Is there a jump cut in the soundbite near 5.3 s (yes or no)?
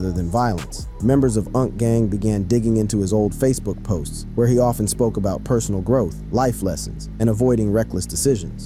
no